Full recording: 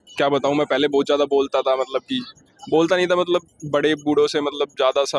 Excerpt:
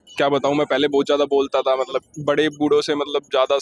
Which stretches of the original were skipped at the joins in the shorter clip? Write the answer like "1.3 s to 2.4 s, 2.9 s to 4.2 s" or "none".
2.1 s to 3.5 s